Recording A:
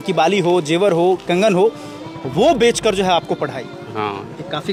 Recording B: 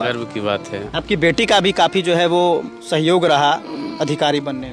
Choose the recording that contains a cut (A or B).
B